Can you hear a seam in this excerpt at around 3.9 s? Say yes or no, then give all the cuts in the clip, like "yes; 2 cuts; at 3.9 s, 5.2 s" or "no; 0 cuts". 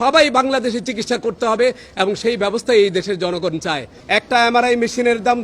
yes; 1 cut; at 3.9 s